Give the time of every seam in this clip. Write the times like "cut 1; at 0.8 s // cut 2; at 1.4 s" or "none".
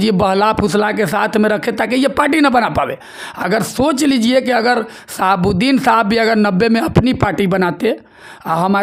none